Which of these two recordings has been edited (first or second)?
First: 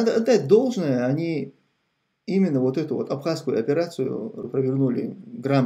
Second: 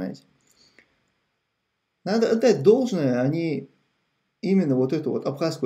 first